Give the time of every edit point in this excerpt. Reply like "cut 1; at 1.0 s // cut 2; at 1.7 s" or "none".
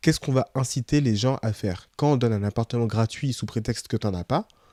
none